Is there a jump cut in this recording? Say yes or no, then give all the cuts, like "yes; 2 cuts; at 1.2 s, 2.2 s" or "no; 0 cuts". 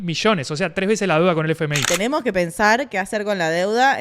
yes; 1 cut; at 1.8 s